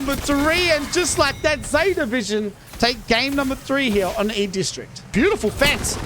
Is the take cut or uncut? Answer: cut